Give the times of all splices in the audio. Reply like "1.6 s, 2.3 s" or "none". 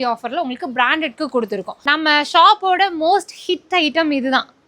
1.7 s